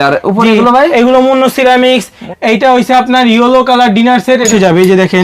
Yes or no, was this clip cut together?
yes